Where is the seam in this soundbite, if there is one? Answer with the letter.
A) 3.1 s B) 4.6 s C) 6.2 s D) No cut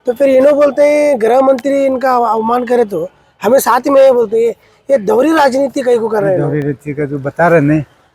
D